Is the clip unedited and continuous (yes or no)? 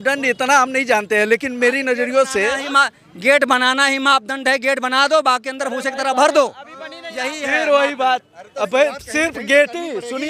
yes